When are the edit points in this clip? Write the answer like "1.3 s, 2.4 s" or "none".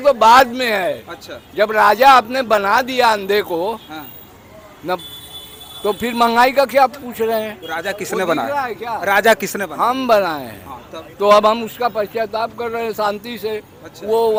none